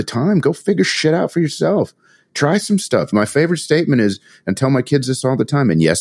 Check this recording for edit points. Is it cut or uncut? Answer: cut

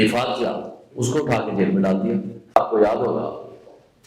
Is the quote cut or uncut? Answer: cut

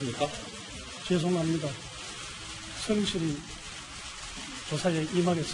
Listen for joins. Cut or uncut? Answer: cut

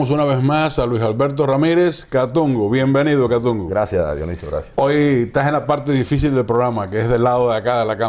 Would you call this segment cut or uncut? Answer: cut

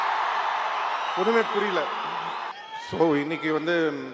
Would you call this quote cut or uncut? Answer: cut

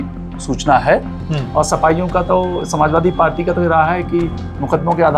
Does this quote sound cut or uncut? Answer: uncut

